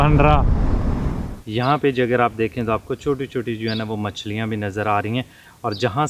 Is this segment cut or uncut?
cut